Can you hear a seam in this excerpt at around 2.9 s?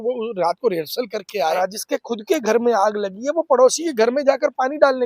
no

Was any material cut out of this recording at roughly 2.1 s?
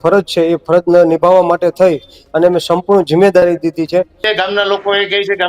no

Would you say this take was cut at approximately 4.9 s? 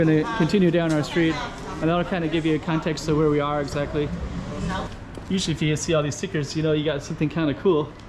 yes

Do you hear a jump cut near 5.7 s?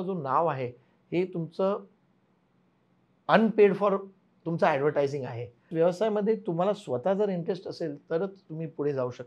yes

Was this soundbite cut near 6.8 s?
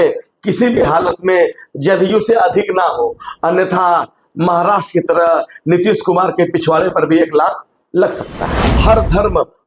no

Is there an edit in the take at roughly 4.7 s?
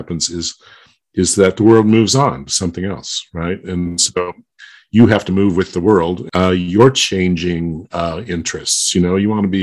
no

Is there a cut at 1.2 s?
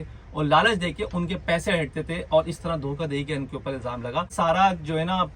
no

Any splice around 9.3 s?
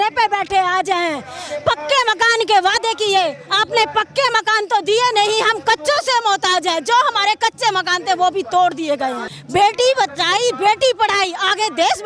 yes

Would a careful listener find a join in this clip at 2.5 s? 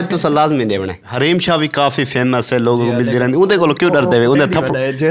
no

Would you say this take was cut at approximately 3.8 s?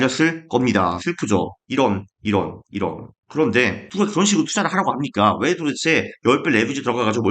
yes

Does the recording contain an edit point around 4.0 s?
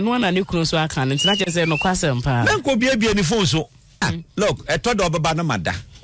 yes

